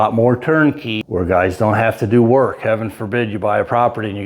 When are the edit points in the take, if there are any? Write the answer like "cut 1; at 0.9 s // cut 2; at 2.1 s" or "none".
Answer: cut 1; at 0.9 s

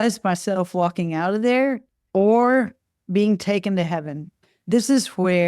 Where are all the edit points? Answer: cut 1; at 1.9 s // cut 2; at 4.4 s

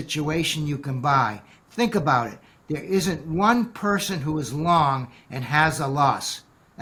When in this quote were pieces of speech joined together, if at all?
none

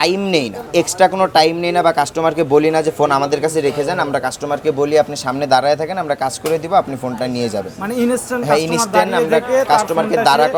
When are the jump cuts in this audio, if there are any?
none

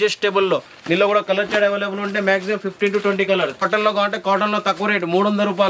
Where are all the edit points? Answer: cut 1; at 3.7 s

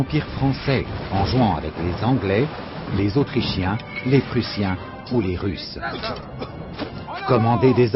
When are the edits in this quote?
cut 1; at 6.0 s

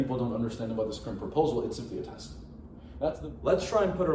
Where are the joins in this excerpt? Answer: cut 1; at 2.9 s

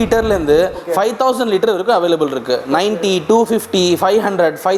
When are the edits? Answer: none

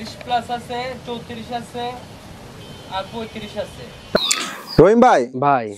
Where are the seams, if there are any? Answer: cut 1; at 4.2 s

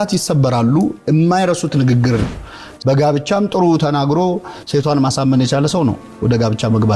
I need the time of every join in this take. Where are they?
cut 1; at 2.4 s

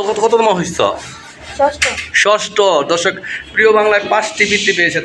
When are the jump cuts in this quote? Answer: none

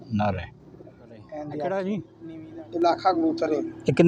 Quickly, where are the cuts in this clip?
cut 1; at 1.3 s

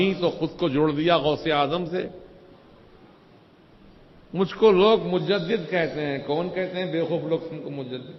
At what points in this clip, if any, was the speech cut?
none

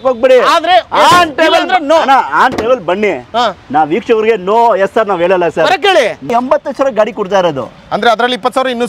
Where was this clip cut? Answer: cut 1; at 6.3 s

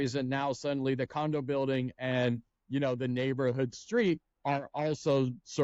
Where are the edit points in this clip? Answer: cut 1; at 4.3 s

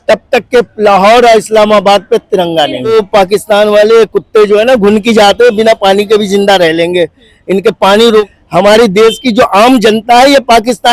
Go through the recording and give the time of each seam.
cut 1; at 2.9 s // cut 2; at 8.3 s

